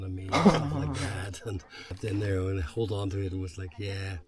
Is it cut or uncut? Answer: cut